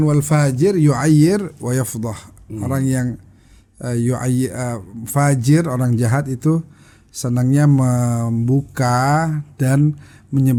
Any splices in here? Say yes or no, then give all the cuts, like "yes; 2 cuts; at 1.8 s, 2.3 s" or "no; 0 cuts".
no; 0 cuts